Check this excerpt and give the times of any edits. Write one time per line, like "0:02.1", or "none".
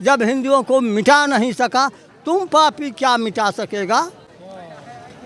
none